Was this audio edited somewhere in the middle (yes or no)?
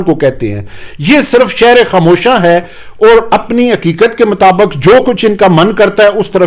no